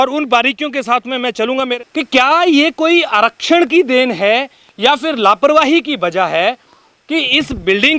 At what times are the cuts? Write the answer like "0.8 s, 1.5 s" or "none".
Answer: 1.7 s